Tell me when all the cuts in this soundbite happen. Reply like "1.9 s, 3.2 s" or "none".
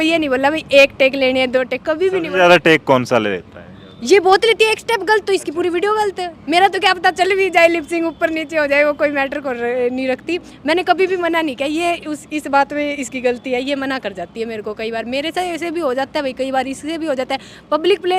none